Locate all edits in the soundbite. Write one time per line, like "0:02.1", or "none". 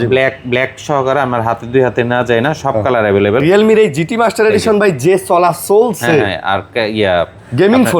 0:03.4